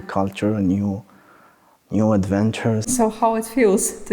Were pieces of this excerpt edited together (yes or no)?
yes